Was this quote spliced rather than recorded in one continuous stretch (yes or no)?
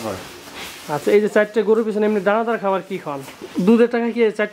yes